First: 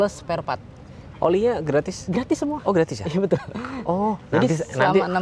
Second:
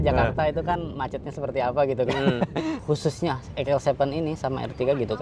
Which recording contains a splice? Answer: second; 1 cut; at 2.8 s

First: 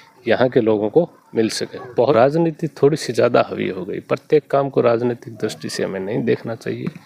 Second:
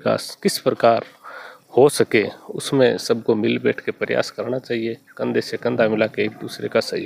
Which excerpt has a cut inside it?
first; 1 cut; at 2.1 s

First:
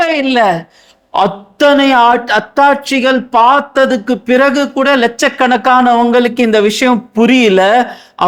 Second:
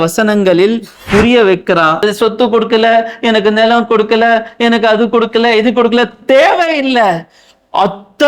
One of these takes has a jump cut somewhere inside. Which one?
second; 1 cut; at 2.0 s

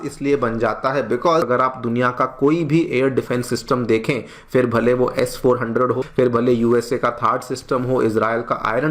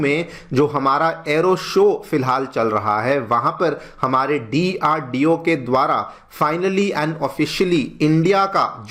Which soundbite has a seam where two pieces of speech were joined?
first; 2 cuts; at 1.5 s, 6.0 s

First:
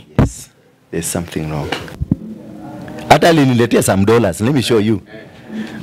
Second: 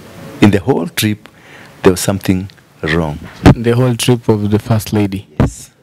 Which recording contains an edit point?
first; 1 cut; at 2.0 s

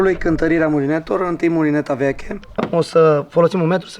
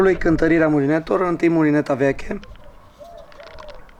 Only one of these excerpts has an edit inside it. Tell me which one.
first; 1 cut; at 2.6 s

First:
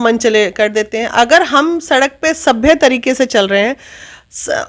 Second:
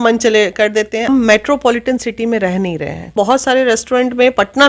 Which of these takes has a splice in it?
second; 2 cuts; at 1.1 s, 3.1 s

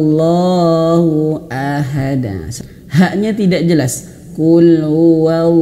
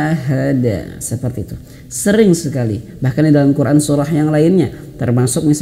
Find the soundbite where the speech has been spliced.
first; 1 cut; at 2.5 s

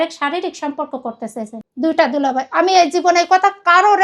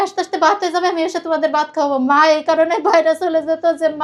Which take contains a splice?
first; 1 cut; at 1.6 s

